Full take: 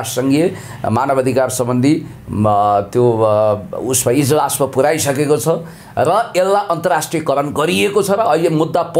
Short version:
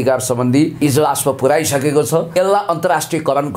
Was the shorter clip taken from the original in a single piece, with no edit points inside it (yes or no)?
no